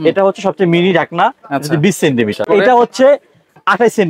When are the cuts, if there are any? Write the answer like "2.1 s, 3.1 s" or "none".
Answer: 2.4 s